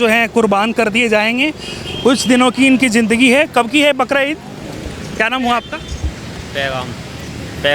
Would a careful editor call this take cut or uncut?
uncut